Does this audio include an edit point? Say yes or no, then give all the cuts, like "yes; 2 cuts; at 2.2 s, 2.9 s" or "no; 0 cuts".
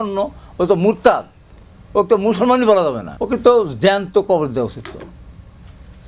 yes; 1 cut; at 3.1 s